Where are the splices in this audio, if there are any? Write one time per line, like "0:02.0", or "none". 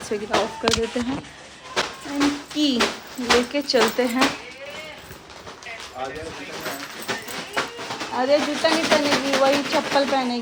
none